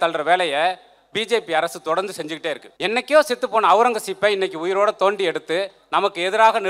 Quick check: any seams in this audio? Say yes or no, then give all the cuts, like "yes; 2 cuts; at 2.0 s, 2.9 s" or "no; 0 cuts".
yes; 1 cut; at 2.7 s